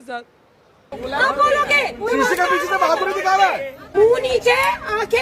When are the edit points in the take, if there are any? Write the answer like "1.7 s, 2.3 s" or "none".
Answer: 1.0 s, 3.9 s